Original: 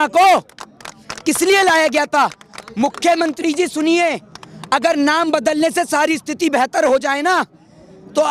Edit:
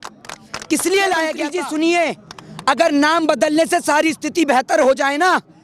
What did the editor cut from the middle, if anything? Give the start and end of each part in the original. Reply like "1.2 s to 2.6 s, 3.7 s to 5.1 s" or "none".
2.0 s to 3.5 s